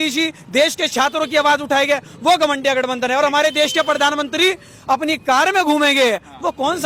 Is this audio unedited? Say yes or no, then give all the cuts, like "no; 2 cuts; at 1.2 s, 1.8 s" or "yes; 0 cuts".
yes; 0 cuts